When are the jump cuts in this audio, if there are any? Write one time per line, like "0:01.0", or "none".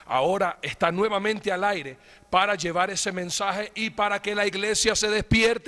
0:03.5